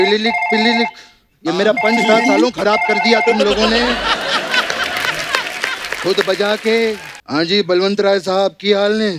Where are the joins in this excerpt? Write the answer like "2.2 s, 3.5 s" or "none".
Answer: 7.1 s